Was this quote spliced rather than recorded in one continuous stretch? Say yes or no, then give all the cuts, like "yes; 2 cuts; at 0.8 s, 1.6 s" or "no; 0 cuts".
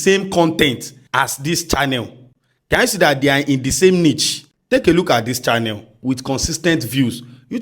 yes; 1 cut; at 0.9 s